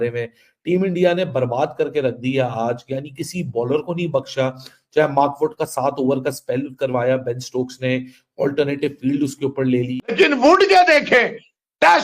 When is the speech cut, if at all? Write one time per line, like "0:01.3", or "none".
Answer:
0:10.1